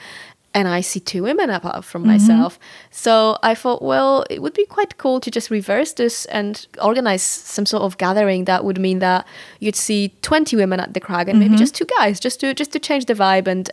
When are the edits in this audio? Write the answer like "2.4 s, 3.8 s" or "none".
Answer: none